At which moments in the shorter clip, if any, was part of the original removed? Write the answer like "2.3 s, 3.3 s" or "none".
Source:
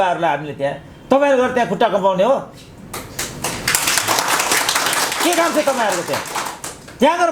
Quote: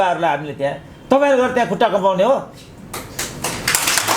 none